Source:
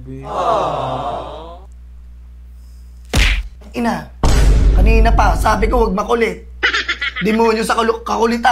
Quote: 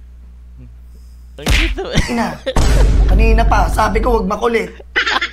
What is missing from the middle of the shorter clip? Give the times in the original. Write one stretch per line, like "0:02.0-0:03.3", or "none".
none